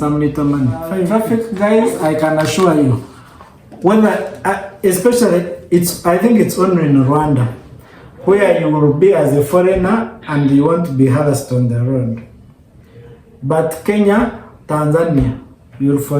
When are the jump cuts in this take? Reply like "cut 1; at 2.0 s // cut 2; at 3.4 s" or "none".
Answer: cut 1; at 1.1 s